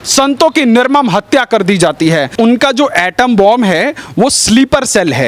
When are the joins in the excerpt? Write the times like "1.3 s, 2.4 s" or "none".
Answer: 2.3 s